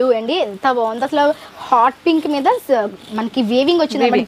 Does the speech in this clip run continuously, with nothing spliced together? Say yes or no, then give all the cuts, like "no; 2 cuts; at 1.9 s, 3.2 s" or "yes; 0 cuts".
yes; 0 cuts